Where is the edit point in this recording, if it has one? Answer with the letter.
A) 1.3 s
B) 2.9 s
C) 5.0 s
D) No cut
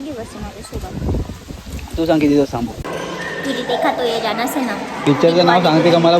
B